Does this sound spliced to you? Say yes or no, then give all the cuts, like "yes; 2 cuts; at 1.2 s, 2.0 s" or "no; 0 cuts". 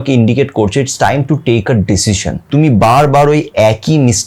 yes; 1 cut; at 2.4 s